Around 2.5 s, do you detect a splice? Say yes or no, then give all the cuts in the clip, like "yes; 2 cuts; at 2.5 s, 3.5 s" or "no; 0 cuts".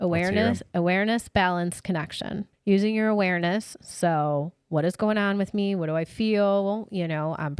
yes; 1 cut; at 2.5 s